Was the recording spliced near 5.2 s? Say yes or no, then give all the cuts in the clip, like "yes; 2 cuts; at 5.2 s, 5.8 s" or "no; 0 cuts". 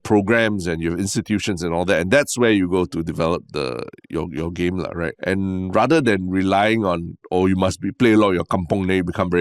yes; 1 cut; at 5.2 s